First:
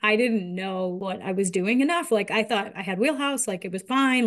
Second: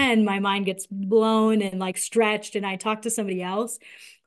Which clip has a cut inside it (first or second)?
first